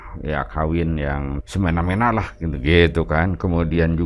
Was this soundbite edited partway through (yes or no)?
yes